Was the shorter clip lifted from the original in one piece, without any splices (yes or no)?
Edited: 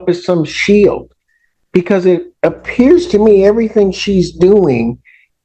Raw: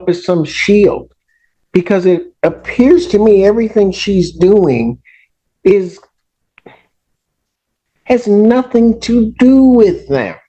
yes